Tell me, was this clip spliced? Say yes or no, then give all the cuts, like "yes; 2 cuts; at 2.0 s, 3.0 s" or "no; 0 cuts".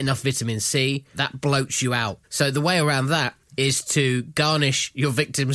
yes; 2 cuts; at 1.2 s, 2.2 s